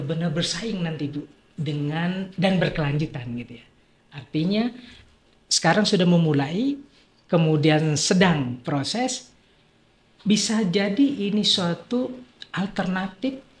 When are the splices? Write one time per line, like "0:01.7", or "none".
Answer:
none